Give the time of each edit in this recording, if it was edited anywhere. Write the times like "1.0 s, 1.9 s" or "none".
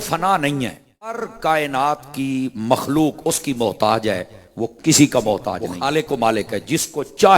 1.3 s, 5.7 s